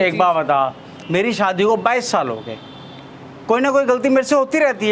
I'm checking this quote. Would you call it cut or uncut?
uncut